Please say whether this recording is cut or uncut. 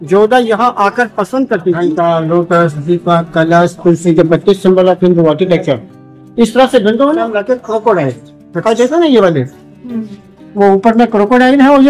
cut